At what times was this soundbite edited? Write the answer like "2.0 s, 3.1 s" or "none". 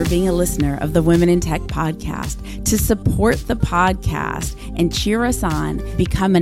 none